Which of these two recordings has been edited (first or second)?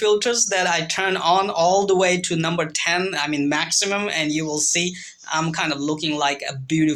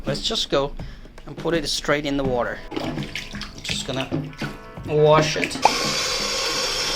second